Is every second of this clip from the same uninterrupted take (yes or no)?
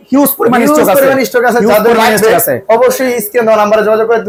yes